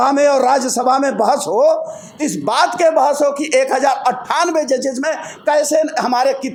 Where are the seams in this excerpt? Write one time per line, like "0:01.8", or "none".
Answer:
none